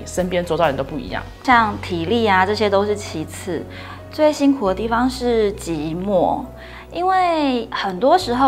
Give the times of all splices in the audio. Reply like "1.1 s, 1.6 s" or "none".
none